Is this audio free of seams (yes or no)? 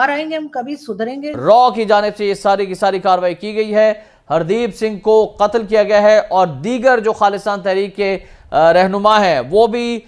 no